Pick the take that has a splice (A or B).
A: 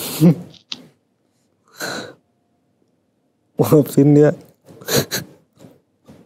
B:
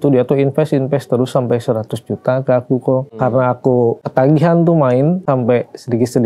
B